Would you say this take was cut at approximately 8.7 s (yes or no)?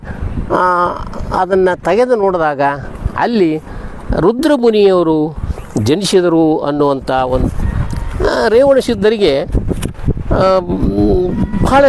no